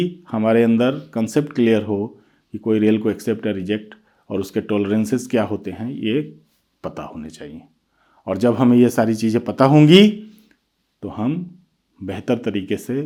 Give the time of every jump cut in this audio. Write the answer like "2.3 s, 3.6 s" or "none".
none